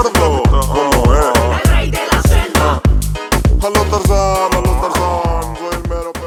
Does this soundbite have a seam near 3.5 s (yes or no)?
no